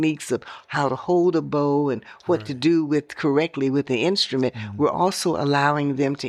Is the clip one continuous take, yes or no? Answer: yes